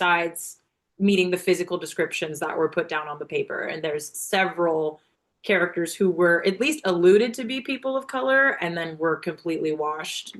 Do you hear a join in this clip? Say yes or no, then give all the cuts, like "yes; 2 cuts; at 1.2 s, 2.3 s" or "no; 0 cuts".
no; 0 cuts